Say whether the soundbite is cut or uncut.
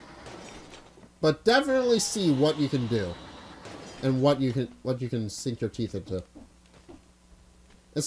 cut